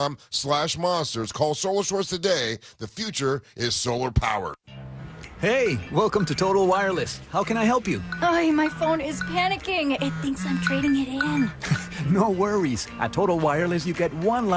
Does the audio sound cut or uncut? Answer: cut